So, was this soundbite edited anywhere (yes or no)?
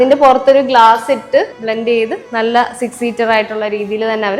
yes